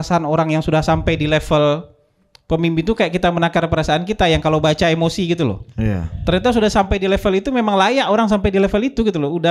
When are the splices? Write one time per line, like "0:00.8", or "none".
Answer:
none